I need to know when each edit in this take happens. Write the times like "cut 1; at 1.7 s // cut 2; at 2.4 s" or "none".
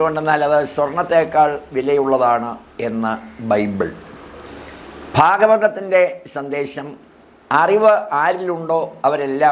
none

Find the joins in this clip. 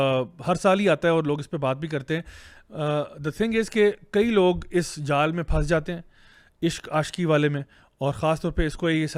none

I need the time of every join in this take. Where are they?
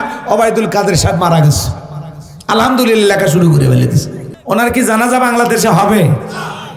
cut 1; at 4.3 s

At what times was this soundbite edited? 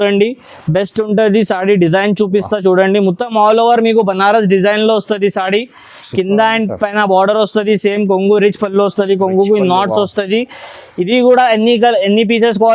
none

